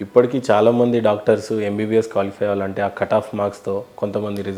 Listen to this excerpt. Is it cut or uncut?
uncut